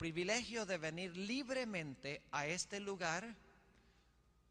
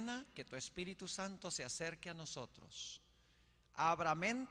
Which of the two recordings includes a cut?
first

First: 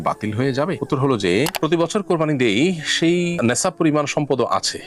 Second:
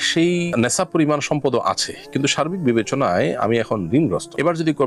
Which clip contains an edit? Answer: first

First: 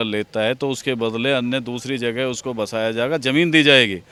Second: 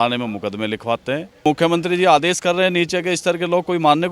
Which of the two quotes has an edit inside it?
second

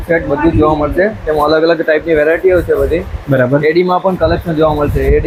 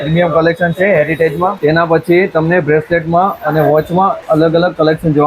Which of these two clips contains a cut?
second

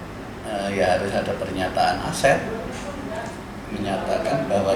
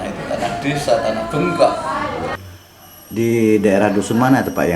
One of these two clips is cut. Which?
second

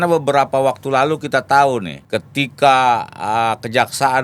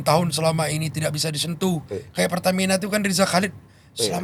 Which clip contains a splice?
first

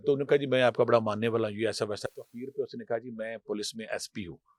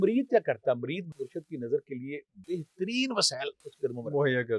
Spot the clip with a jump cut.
second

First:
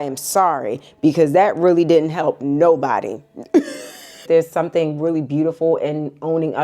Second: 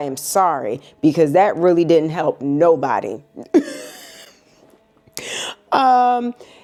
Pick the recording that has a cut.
first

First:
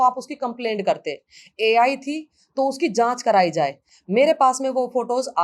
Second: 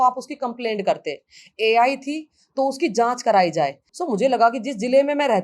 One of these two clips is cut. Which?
second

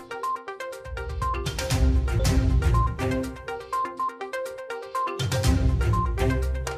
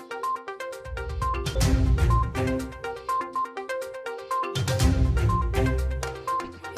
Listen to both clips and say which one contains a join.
second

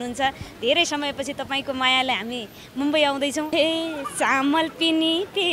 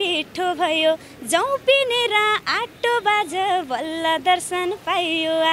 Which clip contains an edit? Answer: first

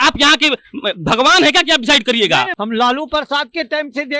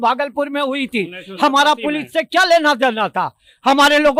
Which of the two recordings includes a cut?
first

